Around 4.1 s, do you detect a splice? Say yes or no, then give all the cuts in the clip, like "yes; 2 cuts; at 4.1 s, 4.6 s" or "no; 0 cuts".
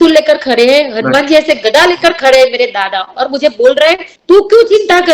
yes; 1 cut; at 4.1 s